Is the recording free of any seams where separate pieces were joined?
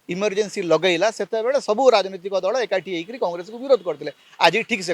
yes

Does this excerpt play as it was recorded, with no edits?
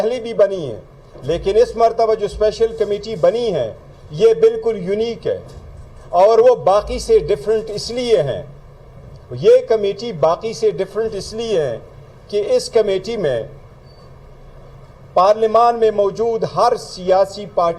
yes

